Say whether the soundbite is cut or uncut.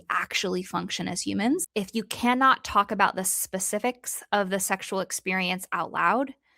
cut